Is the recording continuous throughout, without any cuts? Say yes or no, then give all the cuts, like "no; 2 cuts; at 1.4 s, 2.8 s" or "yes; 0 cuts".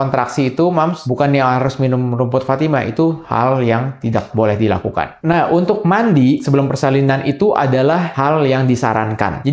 no; 3 cuts; at 5.1 s, 6.4 s, 8.1 s